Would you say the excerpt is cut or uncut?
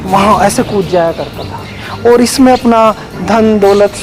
uncut